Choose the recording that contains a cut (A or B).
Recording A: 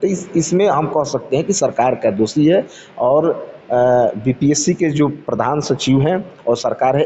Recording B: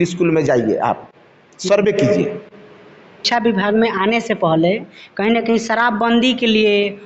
B